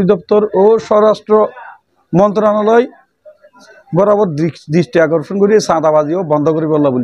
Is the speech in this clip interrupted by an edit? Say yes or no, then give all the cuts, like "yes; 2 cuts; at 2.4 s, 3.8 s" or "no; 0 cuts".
no; 0 cuts